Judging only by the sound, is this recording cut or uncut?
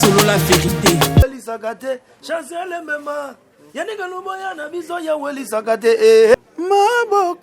cut